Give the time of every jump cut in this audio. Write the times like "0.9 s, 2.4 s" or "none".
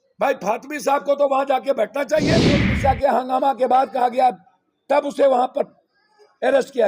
2.7 s